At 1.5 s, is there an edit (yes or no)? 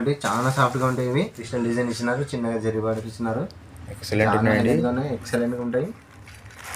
yes